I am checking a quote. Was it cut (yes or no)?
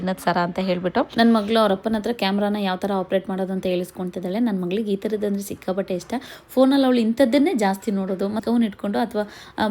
yes